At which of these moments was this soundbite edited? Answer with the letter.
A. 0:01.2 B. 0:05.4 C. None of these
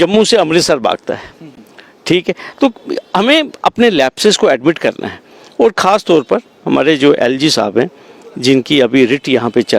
C